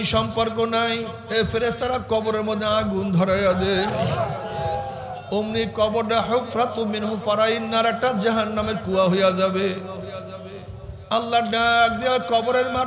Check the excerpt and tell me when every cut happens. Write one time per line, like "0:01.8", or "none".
0:01.2